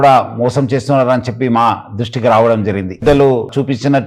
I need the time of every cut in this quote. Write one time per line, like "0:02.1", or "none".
0:03.0